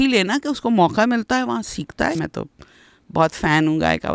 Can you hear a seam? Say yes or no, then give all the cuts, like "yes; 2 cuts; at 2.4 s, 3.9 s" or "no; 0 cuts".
yes; 1 cut; at 2.2 s